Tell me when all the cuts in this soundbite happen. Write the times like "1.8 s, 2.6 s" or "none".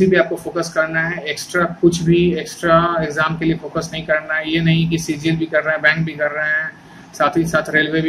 none